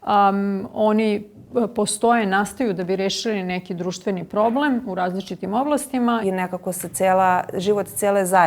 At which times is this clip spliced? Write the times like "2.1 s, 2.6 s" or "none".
6.2 s